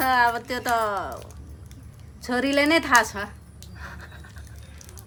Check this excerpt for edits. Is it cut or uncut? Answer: uncut